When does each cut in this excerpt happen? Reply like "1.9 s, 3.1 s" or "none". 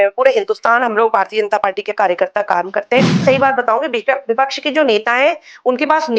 3.2 s